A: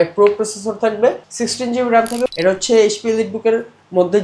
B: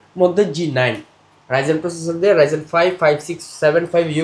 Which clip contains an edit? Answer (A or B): A